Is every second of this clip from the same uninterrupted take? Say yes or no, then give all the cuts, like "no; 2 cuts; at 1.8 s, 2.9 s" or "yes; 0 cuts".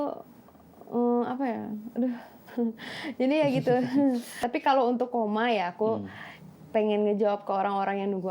no; 1 cut; at 4.3 s